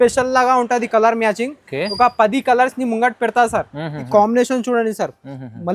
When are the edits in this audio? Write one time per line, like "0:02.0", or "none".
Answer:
0:04.1